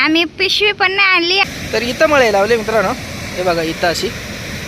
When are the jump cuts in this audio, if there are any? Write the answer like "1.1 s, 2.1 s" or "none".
1.4 s